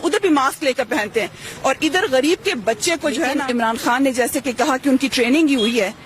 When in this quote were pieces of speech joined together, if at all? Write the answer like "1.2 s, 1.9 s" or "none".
3.4 s